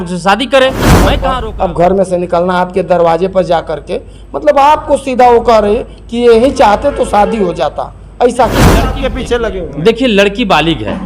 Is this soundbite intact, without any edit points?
no; 2 cuts; at 1.2 s, 9.0 s

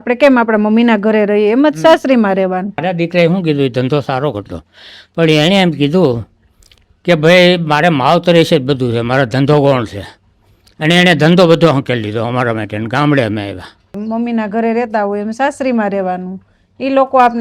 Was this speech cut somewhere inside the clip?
yes; 2 cuts; at 2.8 s, 14.0 s

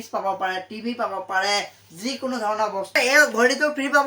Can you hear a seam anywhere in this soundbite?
yes; 1 cut; at 2.9 s

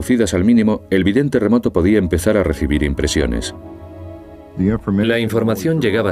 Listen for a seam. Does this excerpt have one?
no; 0 cuts

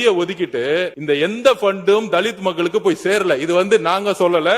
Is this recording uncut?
no; 1 cut; at 0.9 s

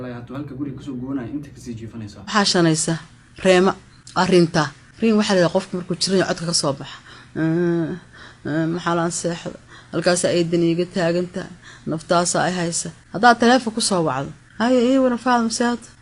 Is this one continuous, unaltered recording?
no; 1 cut; at 2.2 s

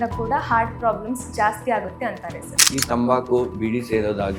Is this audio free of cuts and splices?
no; 1 cut; at 2.6 s

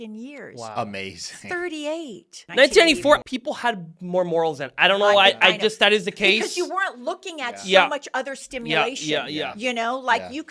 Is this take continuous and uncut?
no; 2 cuts; at 2.4 s, 3.2 s

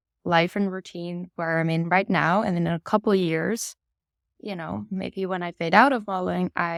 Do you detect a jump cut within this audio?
no; 0 cuts

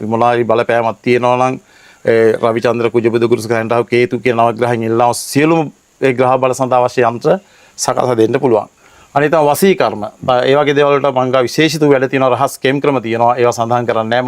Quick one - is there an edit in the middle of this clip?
no; 0 cuts

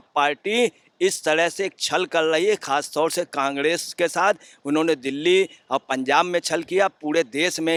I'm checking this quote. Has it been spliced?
no; 0 cuts

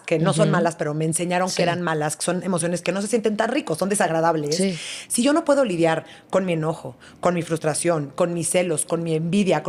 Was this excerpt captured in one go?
yes; 0 cuts

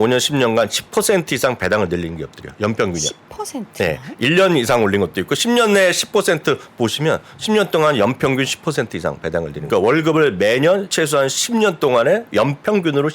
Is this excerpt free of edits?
no; 2 cuts; at 9.6 s, 10.9 s

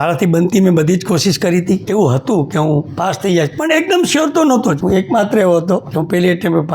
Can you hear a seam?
yes; 3 cuts; at 1.8 s, 4.8 s, 5.9 s

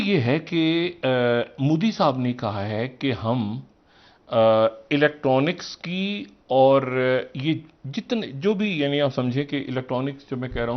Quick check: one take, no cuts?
yes; 0 cuts

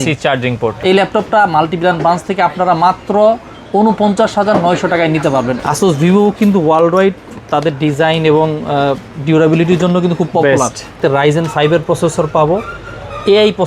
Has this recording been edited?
yes; 3 cuts; at 0.8 s, 5.6 s, 11.0 s

